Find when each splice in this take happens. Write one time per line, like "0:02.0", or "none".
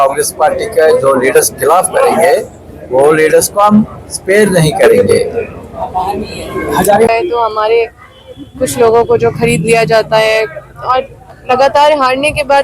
0:07.1